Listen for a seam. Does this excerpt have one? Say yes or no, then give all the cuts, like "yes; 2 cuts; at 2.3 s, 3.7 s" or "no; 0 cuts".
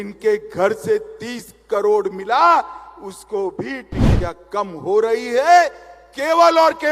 yes; 1 cut; at 4.0 s